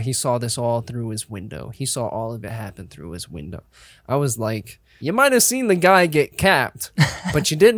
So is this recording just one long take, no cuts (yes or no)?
no